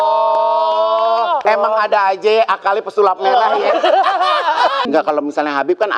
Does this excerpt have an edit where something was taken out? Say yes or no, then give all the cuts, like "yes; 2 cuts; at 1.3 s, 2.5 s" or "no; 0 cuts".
yes; 2 cuts; at 1.4 s, 4.9 s